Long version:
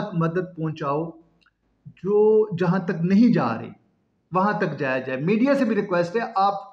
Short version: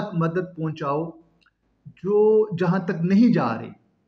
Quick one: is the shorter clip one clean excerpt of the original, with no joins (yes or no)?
yes